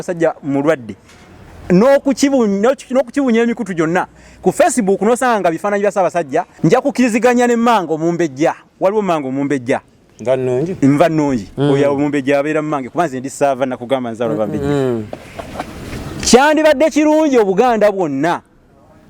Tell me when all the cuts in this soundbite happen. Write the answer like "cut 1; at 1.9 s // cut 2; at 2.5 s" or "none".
cut 1; at 6.5 s